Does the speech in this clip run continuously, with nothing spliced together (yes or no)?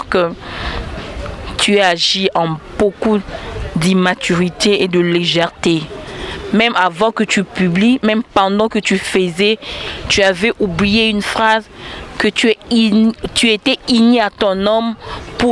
yes